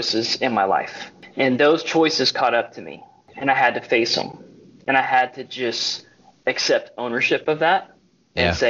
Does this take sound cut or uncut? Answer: cut